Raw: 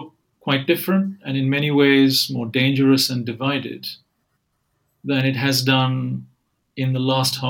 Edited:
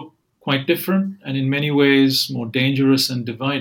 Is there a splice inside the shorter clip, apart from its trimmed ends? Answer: no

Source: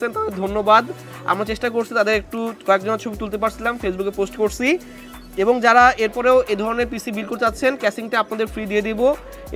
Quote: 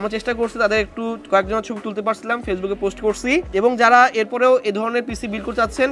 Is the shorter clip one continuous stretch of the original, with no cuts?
no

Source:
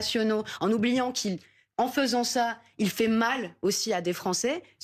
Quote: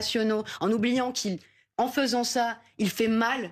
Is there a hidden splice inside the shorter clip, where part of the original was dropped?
no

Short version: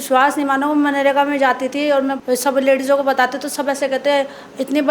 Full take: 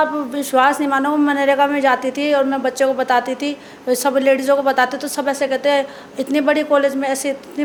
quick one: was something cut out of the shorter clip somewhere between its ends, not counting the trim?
yes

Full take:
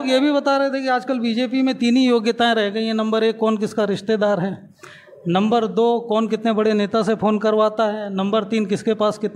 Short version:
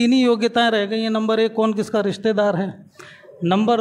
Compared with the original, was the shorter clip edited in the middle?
no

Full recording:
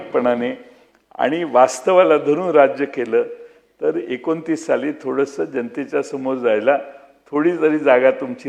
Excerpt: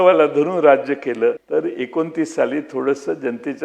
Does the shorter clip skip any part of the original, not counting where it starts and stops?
yes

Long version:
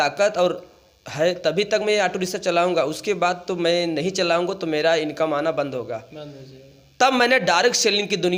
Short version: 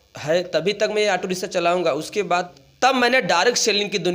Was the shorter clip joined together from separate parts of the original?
yes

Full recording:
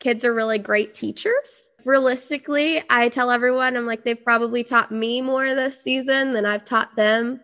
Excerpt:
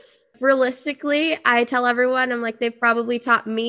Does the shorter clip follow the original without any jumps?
yes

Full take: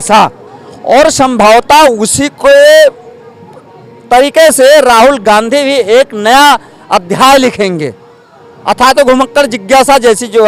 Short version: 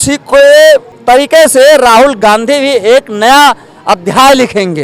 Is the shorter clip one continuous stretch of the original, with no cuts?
no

